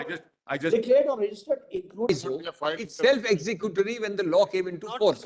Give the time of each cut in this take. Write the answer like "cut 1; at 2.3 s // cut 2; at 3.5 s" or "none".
cut 1; at 2.1 s